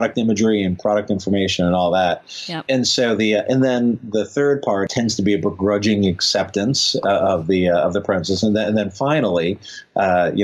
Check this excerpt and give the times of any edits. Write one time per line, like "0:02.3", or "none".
0:02.6
0:04.9